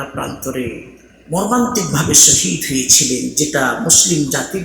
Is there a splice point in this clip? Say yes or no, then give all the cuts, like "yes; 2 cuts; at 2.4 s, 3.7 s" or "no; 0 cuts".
no; 0 cuts